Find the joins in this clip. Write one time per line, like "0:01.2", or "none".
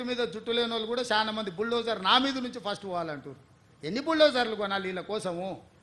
none